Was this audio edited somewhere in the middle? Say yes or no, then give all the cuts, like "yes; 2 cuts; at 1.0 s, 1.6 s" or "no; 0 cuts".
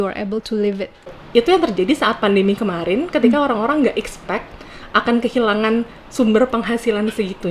yes; 1 cut; at 1.2 s